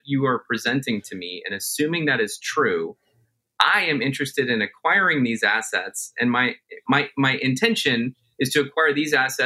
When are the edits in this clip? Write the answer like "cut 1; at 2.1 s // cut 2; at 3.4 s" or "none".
cut 1; at 6.8 s